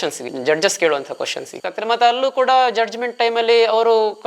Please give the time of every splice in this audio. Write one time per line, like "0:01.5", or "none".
0:01.6